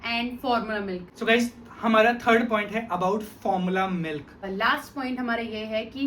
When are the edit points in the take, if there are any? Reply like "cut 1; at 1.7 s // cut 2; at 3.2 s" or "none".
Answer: cut 1; at 1.1 s // cut 2; at 4.4 s